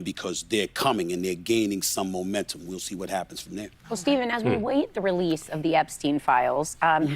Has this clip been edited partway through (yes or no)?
yes